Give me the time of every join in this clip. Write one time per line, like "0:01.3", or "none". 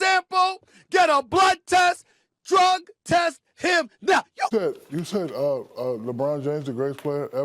0:04.5